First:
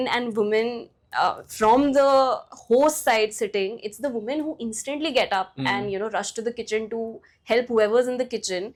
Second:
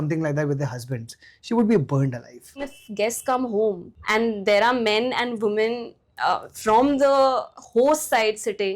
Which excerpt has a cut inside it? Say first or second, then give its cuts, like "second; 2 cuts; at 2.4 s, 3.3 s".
second; 2 cuts; at 2.8 s, 3.9 s